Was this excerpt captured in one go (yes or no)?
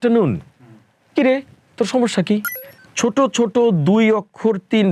no